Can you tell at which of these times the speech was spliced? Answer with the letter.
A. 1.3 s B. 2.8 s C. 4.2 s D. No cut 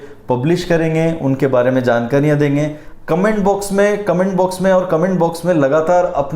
B